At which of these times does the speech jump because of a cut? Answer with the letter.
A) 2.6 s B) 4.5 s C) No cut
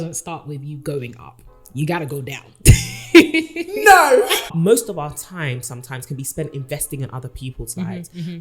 B